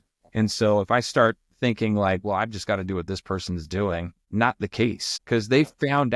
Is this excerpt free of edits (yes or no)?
no